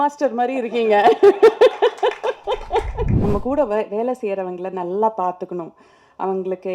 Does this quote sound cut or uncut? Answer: cut